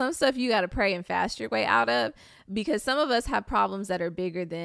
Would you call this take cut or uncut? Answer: uncut